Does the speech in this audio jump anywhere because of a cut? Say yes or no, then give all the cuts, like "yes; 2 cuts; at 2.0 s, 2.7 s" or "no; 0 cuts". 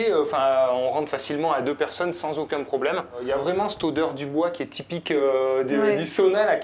yes; 1 cut; at 3.2 s